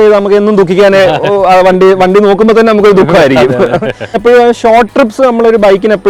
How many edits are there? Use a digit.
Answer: 0